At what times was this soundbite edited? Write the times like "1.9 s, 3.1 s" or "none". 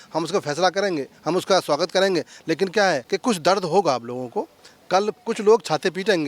3.0 s